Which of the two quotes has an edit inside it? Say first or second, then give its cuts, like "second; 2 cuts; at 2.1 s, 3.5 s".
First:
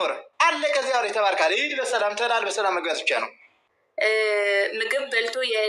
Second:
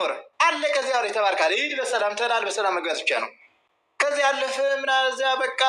first; 1 cut; at 3.8 s